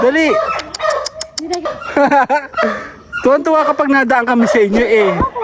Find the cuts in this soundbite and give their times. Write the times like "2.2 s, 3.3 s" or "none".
1.7 s

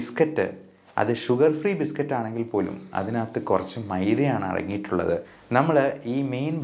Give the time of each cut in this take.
5.3 s

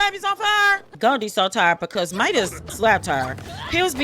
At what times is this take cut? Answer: 0.9 s

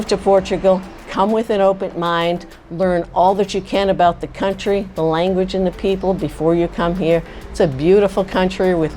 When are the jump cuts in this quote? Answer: none

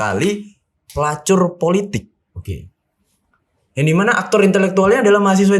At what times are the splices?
none

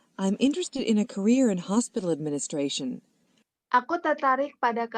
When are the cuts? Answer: none

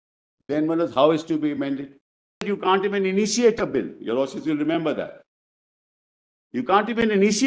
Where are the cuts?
2.4 s

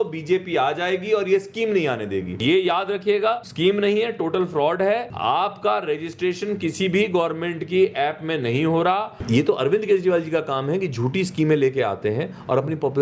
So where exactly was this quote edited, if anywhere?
2.4 s, 3.5 s, 5.1 s, 9.2 s

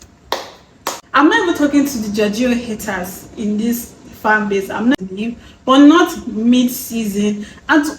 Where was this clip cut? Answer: 0.9 s, 4.9 s

